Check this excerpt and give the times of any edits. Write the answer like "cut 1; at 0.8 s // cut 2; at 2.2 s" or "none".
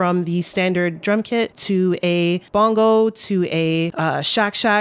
cut 1; at 1.6 s // cut 2; at 2.4 s // cut 3; at 3.9 s

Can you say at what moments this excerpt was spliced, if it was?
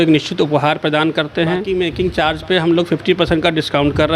cut 1; at 1.6 s

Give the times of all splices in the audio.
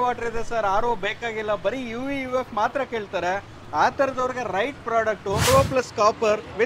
cut 1; at 5.5 s

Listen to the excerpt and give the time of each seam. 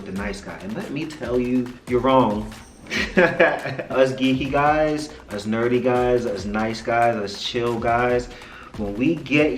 cut 1; at 1.8 s // cut 2; at 3.9 s

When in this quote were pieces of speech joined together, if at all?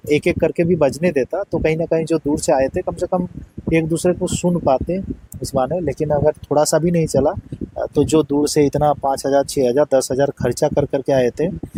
none

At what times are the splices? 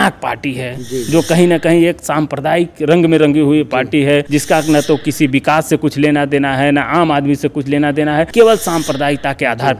cut 1; at 4.3 s // cut 2; at 8.3 s

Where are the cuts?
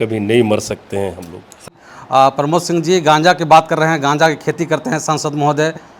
cut 1; at 1.7 s

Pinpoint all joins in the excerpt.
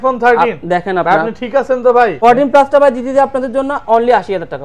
cut 1; at 2.2 s

